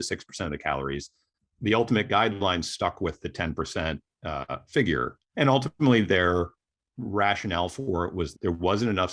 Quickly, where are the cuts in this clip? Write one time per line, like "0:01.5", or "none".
0:05.2
0:08.3